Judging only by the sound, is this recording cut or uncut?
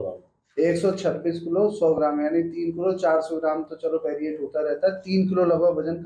uncut